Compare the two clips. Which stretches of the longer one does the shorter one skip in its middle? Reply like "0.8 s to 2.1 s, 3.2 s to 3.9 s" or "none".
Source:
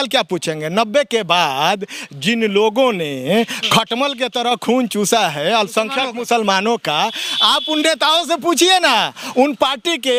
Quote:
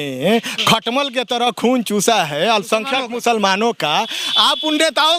none